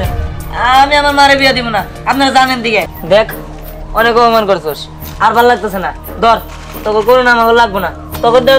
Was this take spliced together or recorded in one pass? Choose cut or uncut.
cut